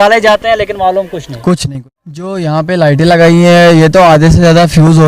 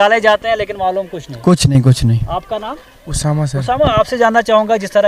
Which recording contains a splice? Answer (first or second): first